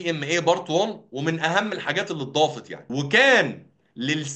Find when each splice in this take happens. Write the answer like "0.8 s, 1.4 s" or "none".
2.7 s